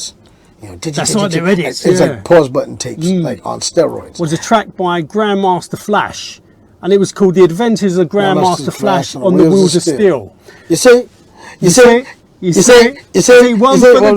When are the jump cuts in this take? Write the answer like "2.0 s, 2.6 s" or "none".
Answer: 4.0 s